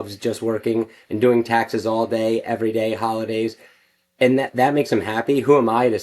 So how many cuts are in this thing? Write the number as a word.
zero